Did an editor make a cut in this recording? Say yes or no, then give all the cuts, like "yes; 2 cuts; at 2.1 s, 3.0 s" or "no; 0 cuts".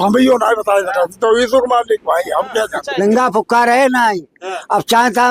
yes; 1 cut; at 2.8 s